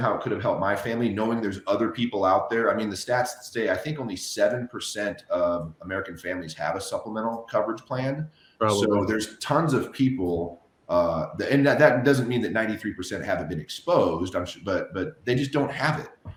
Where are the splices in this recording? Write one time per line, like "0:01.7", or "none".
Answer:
none